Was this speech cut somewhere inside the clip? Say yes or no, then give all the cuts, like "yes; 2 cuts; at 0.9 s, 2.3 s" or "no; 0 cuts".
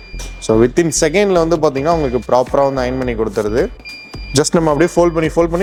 no; 0 cuts